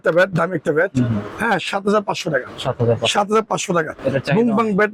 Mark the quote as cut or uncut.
uncut